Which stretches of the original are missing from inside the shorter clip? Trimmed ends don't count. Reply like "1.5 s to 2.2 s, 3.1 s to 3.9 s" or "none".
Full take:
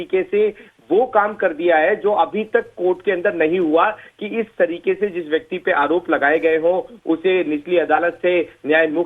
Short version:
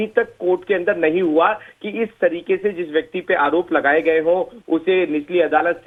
none